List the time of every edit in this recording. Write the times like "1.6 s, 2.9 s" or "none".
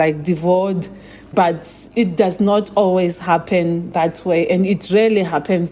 1.3 s